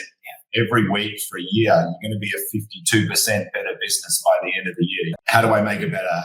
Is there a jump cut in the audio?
yes; 1 cut; at 5.1 s

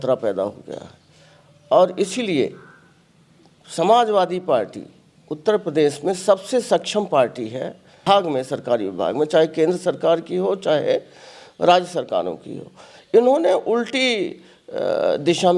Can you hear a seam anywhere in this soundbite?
yes; 1 cut; at 8.0 s

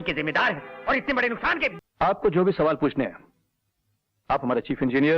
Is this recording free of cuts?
no; 1 cut; at 1.8 s

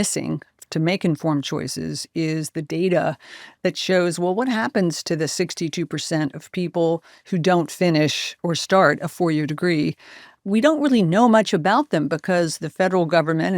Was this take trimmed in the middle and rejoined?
yes; 2 cuts; at 8.3 s, 10.4 s

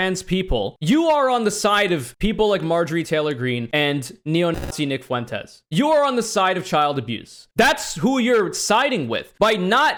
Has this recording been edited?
no; 0 cuts

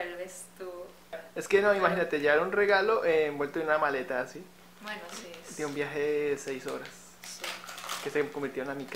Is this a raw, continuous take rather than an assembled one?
no; 1 cut; at 1.2 s

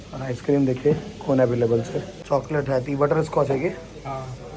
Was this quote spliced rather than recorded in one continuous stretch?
yes; 1 cut; at 2.1 s

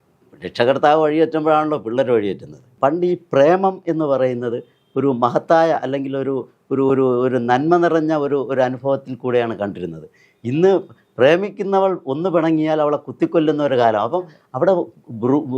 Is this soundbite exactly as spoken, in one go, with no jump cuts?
no; 1 cut; at 2.7 s

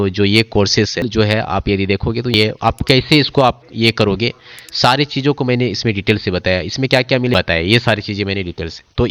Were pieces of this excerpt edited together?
yes; 3 cuts; at 1.0 s, 2.3 s, 7.3 s

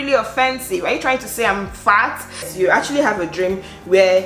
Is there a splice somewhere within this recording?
yes; 1 cut; at 2.5 s

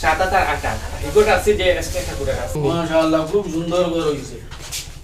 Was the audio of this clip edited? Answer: yes; 1 cut; at 2.6 s

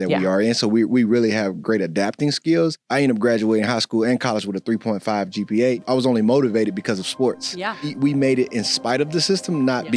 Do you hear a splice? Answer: yes; 3 cuts; at 2.8 s, 5.8 s, 7.9 s

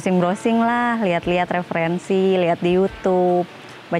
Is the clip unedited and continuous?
yes; 0 cuts

